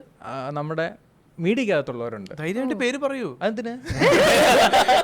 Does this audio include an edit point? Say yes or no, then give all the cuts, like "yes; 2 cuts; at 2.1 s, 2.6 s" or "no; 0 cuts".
no; 0 cuts